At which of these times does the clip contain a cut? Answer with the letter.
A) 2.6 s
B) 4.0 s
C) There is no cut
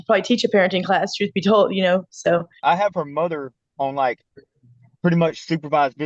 A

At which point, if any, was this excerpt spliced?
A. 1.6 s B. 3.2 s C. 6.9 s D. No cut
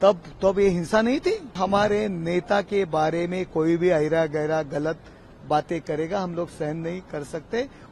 A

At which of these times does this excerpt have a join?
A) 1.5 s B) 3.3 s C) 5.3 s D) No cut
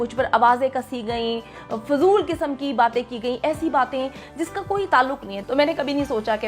C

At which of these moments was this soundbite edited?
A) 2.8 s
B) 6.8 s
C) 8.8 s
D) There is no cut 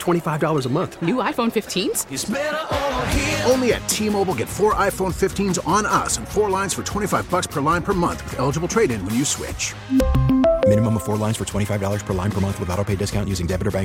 D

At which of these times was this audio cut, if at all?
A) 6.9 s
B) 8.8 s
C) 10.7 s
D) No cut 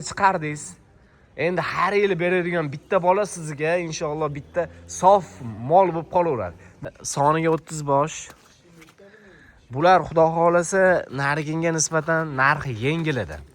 A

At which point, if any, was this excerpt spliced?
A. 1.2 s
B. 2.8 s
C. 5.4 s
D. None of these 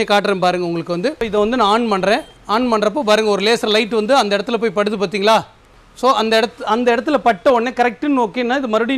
A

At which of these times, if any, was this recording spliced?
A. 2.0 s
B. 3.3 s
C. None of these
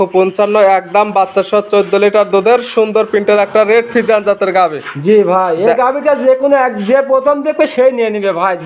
C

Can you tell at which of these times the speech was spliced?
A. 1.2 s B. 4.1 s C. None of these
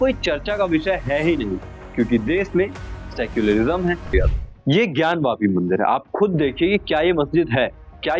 B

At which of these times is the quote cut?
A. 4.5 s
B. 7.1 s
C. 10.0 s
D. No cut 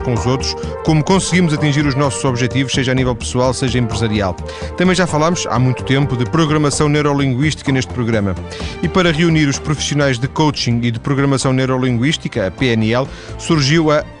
D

